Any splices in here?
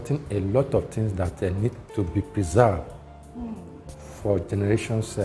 no; 0 cuts

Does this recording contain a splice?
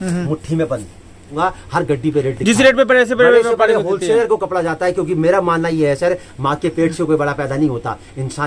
yes; 1 cut; at 1.3 s

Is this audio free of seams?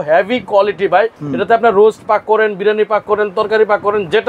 no; 1 cut; at 1.2 s

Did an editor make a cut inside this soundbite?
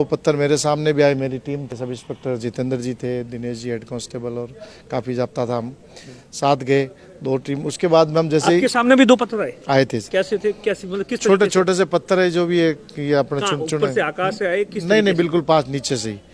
yes; 1 cut; at 1.7 s

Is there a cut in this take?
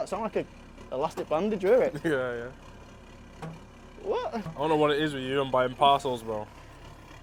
no; 0 cuts

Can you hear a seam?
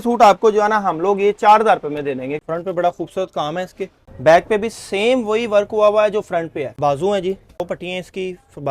yes; 4 cuts; at 2.4 s, 4.0 s, 6.7 s, 7.6 s

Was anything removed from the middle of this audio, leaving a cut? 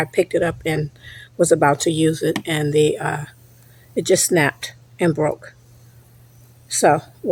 no; 0 cuts

